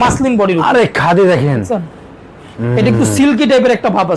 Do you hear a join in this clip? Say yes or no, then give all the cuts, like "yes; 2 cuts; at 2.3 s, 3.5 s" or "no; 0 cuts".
no; 0 cuts